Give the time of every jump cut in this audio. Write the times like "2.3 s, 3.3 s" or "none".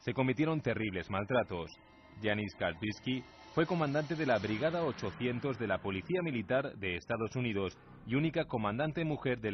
none